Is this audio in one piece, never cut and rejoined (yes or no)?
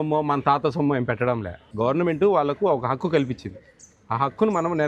no